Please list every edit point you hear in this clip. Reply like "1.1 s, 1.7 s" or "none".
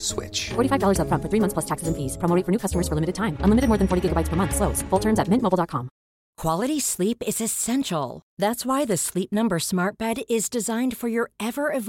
6.2 s